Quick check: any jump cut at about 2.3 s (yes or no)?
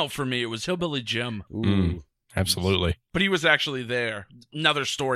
no